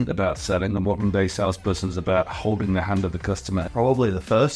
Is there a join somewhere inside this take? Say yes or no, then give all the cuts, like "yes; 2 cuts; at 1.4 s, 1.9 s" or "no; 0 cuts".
yes; 1 cut; at 3.7 s